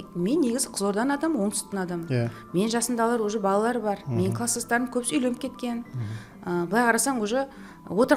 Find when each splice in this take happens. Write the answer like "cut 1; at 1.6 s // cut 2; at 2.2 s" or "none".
none